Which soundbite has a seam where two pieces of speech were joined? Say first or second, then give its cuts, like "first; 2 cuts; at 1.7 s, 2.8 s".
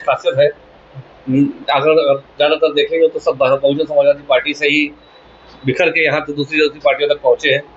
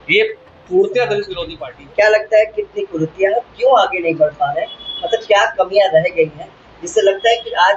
second; 1 cut; at 1.4 s